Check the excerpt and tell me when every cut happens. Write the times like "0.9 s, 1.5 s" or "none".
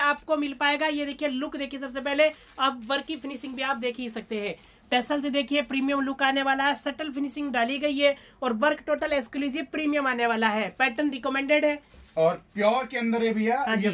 none